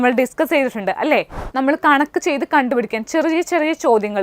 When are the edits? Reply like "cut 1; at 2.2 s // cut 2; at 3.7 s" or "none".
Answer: cut 1; at 1.4 s

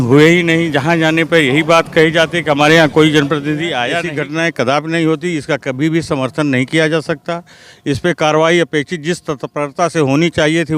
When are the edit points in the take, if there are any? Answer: cut 1; at 4.0 s

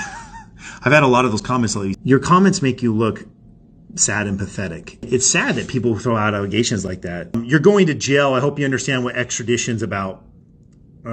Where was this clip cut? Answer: cut 1; at 1.9 s // cut 2; at 5.1 s // cut 3; at 7.3 s

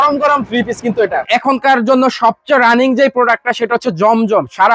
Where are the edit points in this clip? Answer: cut 1; at 1.2 s

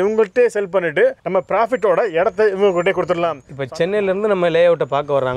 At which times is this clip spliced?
cut 1; at 3.5 s

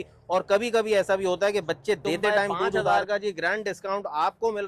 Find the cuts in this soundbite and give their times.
cut 1; at 2.8 s

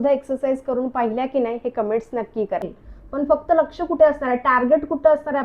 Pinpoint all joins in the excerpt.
cut 1; at 2.7 s

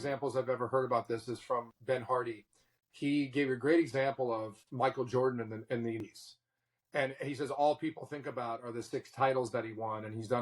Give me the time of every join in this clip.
cut 1; at 1.7 s // cut 2; at 6.0 s

